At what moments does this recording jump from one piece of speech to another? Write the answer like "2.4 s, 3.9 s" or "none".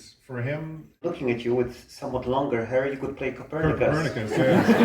1.0 s